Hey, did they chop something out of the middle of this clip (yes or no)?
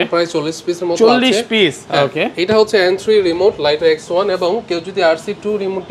no